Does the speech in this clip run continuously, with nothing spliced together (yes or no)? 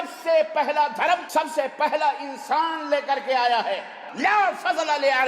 no